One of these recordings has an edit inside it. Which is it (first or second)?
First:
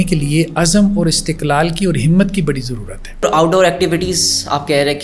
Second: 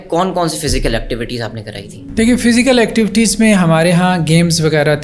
first